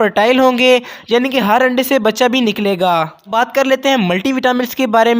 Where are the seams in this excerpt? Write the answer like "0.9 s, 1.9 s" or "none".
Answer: 3.3 s